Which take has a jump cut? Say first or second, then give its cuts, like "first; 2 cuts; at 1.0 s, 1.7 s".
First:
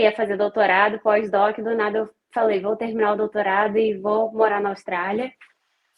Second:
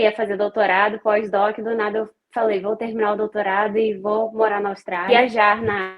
second; 1 cut; at 5.1 s